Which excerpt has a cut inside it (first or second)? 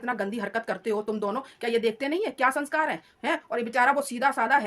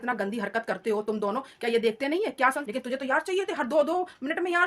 second